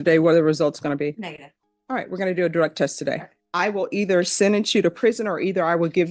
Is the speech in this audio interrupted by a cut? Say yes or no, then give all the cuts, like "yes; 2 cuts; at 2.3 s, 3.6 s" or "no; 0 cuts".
yes; 1 cut; at 3.4 s